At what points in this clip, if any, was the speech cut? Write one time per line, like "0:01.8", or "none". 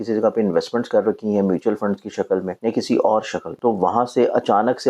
0:02.5
0:03.4